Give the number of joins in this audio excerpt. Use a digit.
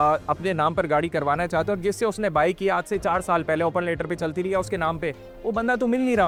0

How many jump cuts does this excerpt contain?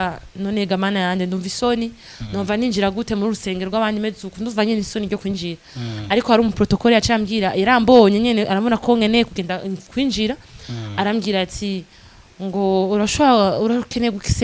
0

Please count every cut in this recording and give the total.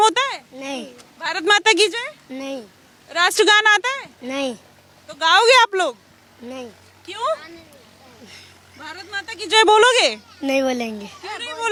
0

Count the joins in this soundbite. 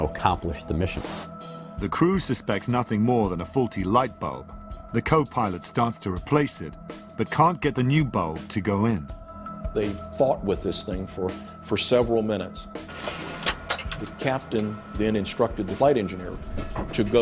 1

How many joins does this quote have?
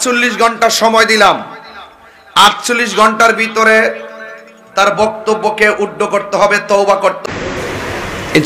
1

